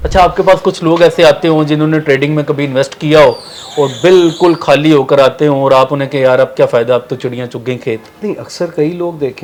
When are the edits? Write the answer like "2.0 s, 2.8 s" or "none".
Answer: none